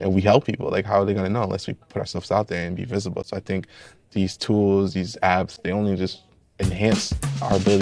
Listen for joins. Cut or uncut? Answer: uncut